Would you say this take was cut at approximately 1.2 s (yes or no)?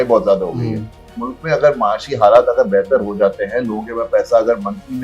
yes